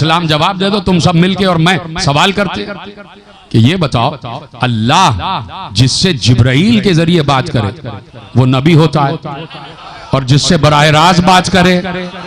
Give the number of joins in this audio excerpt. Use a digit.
0